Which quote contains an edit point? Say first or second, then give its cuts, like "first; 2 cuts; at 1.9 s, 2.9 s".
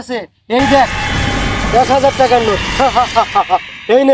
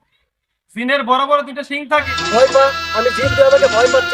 second; 1 cut; at 2.2 s